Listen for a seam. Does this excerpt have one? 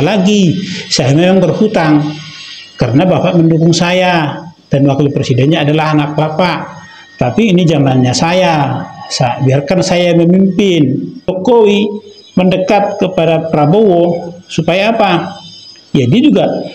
yes; 1 cut; at 11.3 s

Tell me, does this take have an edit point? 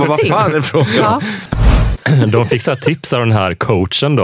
yes; 1 cut; at 1.8 s

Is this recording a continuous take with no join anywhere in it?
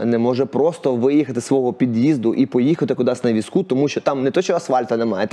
yes; 0 cuts

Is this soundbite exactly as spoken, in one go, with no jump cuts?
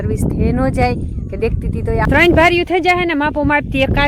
no; 1 cut; at 2.1 s

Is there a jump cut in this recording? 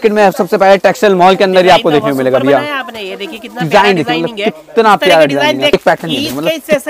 yes; 1 cut; at 5.7 s

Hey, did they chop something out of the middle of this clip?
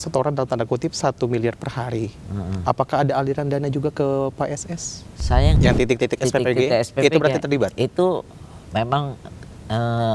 yes; 1 cut; at 5.6 s

